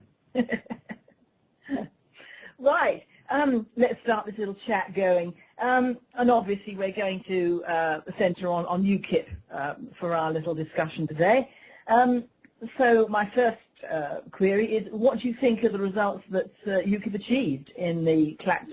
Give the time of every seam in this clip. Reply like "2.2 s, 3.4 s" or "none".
12.0 s